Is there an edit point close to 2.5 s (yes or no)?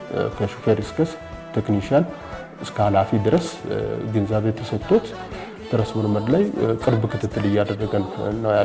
no